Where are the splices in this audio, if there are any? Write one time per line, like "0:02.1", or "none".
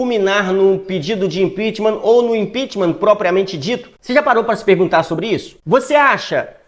0:03.9
0:05.5